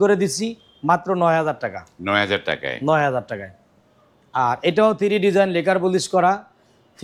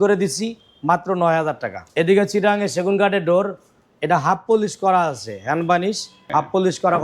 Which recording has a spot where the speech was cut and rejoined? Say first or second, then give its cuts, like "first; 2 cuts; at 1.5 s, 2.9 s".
second; 2 cuts; at 1.7 s, 6.1 s